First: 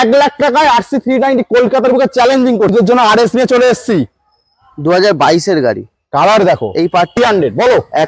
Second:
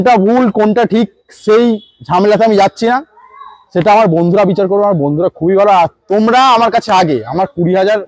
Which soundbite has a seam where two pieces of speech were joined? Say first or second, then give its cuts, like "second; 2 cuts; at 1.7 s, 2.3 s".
first; 2 cuts; at 2.7 s, 7.2 s